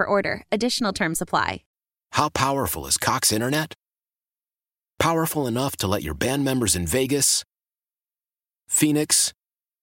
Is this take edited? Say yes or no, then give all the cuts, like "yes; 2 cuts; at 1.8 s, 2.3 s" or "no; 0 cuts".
yes; 1 cut; at 1.7 s